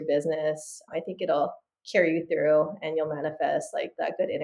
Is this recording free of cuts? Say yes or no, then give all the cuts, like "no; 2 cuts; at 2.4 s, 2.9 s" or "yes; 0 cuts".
yes; 0 cuts